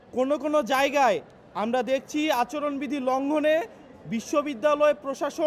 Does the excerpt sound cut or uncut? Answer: uncut